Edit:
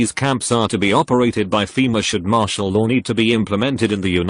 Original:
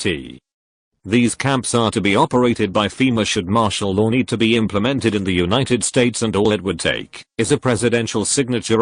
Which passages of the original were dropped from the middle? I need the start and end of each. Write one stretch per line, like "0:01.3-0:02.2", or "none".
none

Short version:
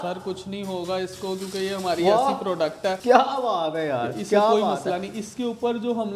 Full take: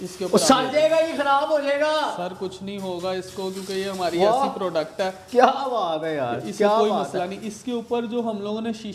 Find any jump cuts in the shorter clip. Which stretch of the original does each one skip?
0:05.1-0:05.3

